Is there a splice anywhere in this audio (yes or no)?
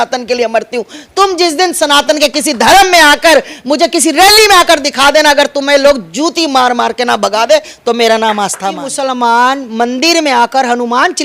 yes